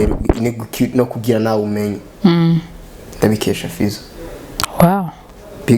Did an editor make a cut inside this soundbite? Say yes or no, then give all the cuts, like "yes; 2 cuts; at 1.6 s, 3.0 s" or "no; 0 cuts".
no; 0 cuts